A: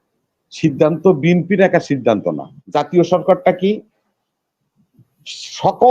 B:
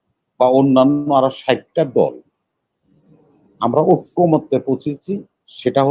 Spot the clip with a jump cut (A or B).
A